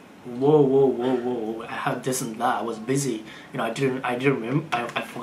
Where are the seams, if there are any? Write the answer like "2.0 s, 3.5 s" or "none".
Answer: none